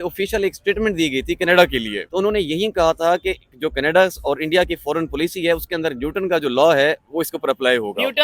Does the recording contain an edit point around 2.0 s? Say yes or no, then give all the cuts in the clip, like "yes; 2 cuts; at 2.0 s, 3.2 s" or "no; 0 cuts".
yes; 1 cut; at 2.0 s